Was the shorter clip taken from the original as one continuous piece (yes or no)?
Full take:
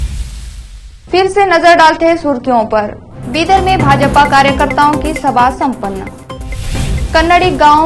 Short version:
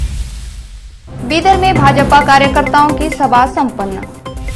no